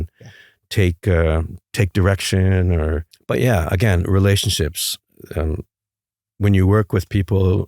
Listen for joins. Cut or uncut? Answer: cut